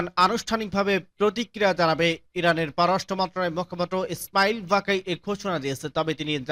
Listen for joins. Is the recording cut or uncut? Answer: uncut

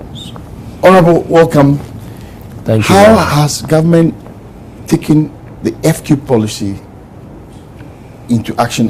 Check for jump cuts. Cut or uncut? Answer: cut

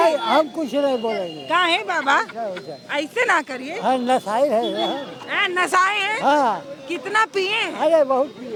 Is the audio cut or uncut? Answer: uncut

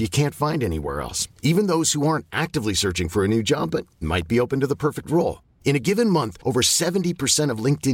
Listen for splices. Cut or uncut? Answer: uncut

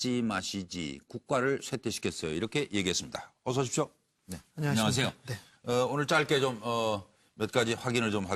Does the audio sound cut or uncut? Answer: uncut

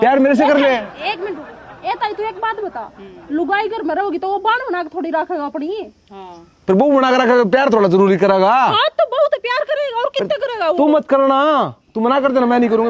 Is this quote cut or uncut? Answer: uncut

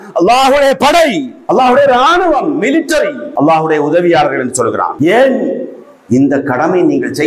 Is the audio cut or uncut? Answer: cut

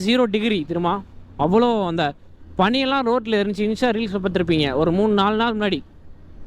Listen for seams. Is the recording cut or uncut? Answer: uncut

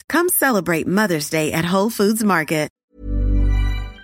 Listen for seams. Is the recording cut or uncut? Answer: cut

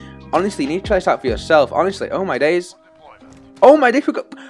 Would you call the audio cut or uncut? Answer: uncut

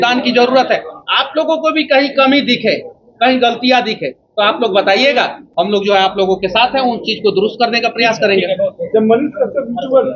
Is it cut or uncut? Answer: uncut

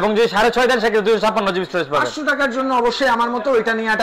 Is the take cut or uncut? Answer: uncut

